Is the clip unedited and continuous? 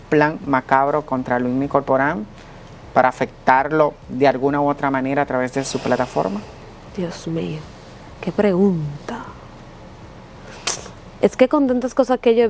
yes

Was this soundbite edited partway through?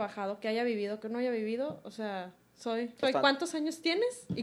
yes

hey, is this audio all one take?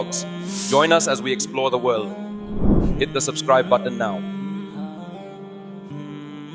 yes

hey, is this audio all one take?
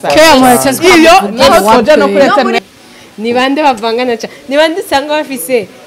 no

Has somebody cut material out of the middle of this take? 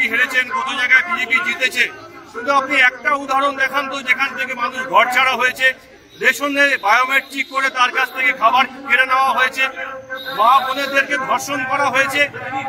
no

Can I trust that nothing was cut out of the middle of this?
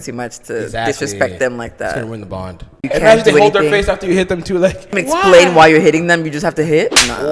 no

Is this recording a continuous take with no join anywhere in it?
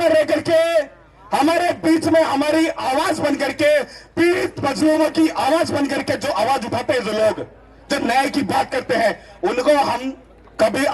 yes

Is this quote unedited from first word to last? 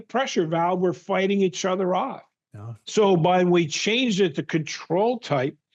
yes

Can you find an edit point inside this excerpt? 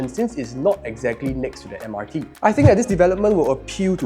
yes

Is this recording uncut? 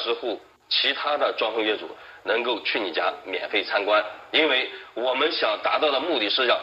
no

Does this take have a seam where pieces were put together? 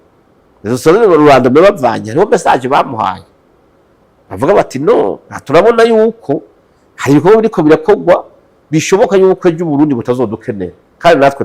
no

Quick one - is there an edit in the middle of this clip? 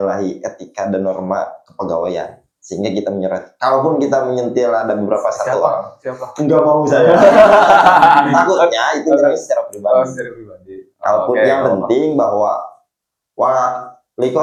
no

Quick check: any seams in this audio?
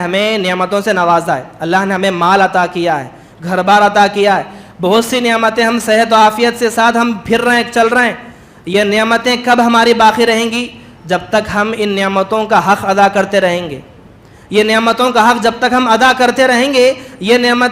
no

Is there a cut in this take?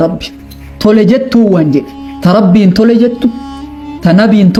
no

